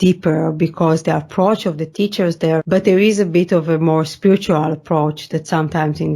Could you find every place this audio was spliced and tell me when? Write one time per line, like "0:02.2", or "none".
0:02.6